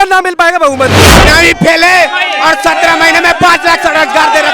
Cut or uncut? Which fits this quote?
cut